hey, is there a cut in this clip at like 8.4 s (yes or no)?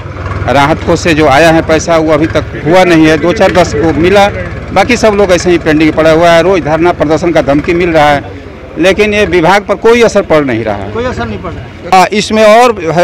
no